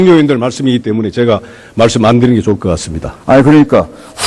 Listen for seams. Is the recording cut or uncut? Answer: uncut